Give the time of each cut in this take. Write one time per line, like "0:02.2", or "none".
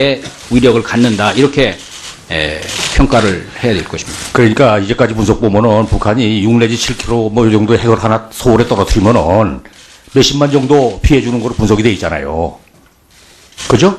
0:05.2